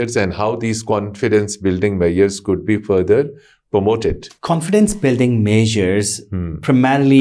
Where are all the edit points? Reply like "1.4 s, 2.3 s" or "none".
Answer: 4.3 s